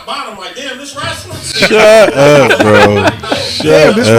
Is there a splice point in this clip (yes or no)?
no